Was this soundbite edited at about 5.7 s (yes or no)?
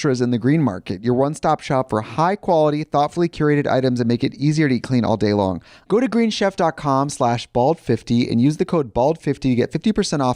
yes